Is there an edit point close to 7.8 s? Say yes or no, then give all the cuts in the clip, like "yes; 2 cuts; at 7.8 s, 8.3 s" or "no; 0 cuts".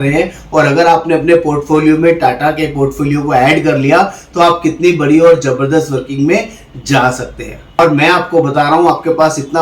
yes; 1 cut; at 7.8 s